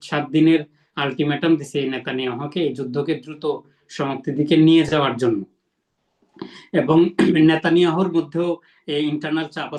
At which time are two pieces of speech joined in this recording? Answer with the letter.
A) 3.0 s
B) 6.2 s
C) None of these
C